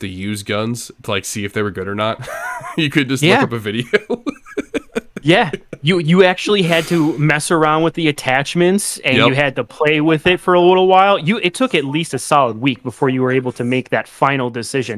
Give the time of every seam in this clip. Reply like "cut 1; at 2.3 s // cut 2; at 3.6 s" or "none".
none